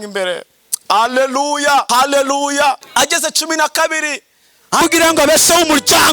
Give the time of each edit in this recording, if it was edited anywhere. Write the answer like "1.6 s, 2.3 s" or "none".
1.9 s, 2.8 s, 4.8 s